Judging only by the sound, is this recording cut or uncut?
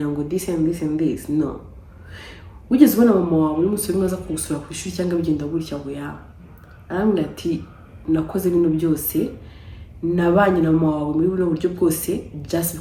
uncut